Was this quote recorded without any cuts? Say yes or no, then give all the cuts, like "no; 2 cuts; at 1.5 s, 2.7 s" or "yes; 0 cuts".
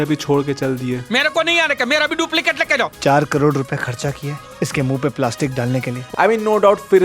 no; 2 cuts; at 2.9 s, 6.0 s